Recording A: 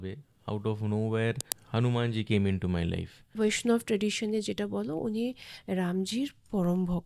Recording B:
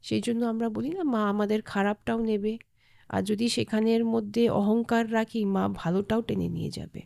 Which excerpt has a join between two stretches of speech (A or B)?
A